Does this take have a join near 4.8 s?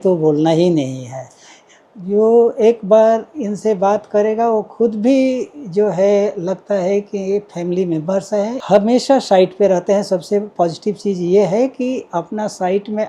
no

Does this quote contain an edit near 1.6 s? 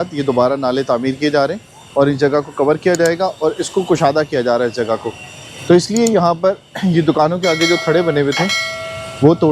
no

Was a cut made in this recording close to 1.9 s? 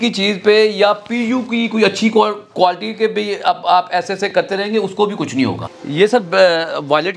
no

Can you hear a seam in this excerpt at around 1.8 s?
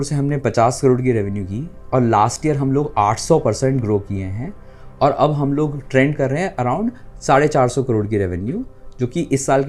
no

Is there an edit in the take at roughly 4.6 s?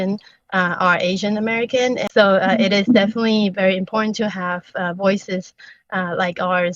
no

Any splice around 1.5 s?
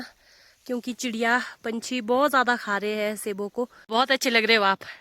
no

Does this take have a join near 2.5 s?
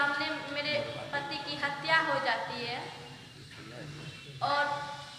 no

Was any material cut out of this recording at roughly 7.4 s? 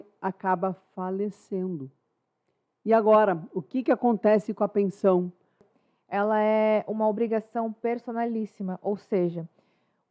no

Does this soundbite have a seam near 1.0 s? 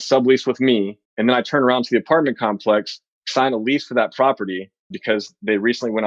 yes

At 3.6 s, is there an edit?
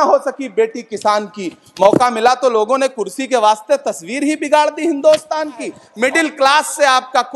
no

